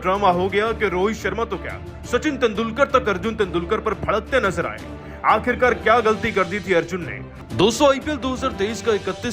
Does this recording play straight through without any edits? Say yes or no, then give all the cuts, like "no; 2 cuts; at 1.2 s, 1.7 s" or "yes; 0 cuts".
yes; 0 cuts